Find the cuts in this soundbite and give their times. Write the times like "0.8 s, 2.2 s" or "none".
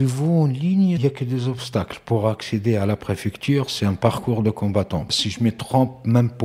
1.0 s, 5.1 s